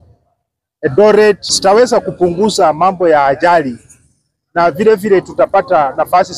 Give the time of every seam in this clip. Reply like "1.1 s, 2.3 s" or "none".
1.5 s